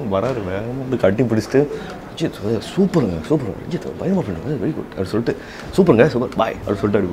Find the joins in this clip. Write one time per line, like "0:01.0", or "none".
none